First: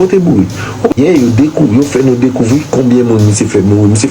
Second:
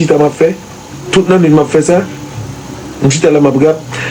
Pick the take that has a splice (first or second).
first